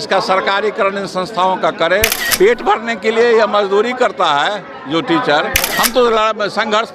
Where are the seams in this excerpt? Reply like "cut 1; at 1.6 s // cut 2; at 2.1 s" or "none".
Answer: cut 1; at 2.2 s // cut 2; at 5.7 s